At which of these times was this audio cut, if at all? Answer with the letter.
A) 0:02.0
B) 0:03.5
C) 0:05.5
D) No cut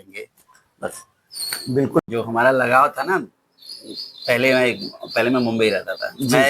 A